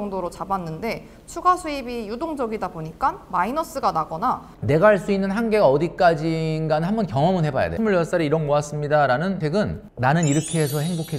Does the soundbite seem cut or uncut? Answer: cut